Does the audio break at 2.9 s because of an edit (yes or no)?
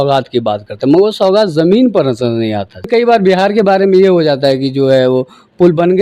yes